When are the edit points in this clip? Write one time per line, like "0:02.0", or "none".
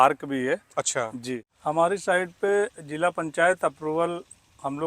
0:01.5